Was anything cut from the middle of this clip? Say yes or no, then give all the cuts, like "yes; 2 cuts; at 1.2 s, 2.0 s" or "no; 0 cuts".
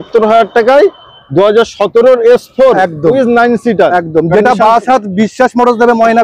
no; 0 cuts